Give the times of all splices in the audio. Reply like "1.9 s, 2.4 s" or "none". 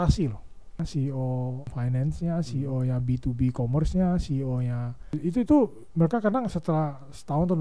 0.8 s, 1.7 s, 5.1 s